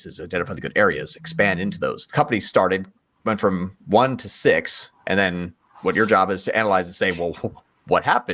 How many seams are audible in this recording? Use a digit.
1